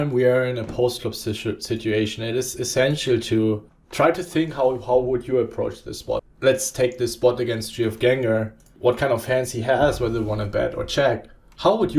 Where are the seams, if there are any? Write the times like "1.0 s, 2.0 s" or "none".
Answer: 3.8 s, 6.3 s, 8.7 s

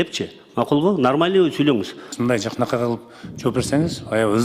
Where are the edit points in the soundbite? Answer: 2.0 s

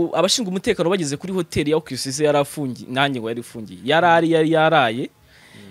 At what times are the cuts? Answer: none

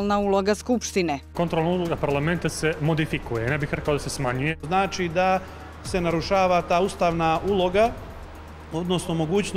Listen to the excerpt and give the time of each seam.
1.3 s, 4.6 s

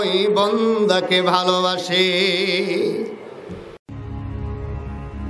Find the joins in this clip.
3.8 s

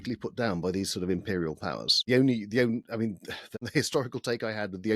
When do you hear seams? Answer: 2.0 s, 3.4 s

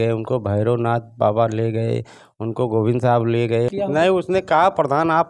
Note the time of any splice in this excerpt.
3.7 s

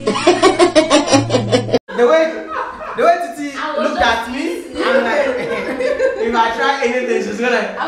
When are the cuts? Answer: none

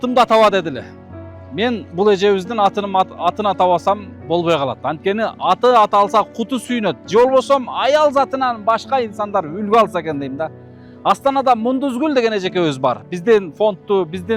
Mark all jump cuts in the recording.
none

